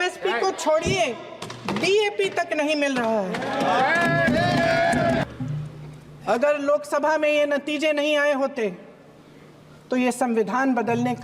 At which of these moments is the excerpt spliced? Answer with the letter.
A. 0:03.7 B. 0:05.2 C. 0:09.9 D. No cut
B